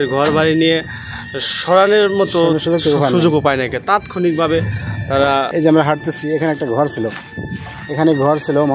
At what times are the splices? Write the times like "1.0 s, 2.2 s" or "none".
5.5 s